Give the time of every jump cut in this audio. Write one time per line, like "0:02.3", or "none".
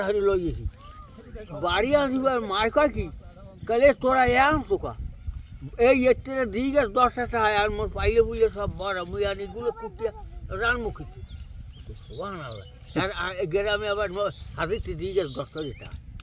none